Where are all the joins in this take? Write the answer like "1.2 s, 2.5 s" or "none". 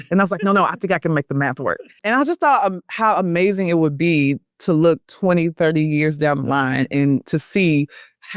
7.3 s